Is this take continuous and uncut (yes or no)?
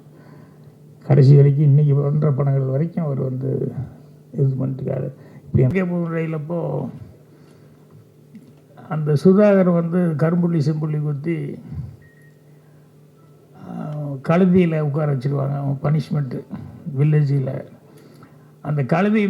no